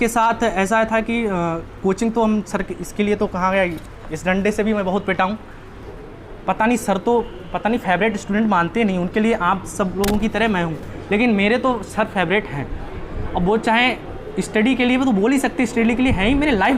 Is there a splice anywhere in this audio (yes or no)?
yes